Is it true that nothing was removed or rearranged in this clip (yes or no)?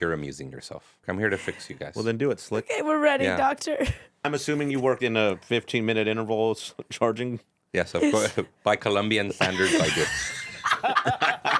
no